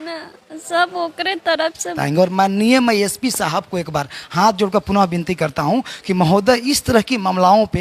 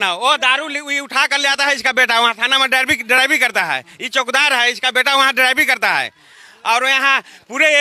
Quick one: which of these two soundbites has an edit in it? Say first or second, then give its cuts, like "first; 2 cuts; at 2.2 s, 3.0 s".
first; 1 cut; at 2.0 s